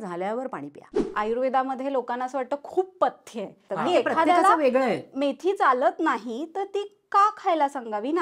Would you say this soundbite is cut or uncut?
cut